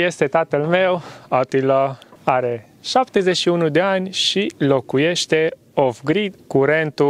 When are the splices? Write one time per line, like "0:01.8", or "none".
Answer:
0:02.1
0:06.3